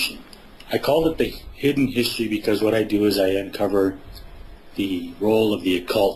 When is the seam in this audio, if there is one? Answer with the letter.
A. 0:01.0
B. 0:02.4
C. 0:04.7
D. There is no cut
B